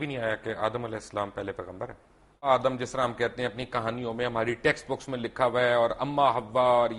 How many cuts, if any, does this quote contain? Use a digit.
1